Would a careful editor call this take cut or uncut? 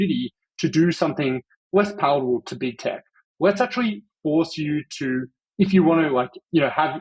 cut